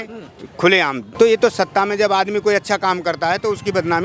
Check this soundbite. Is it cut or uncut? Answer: cut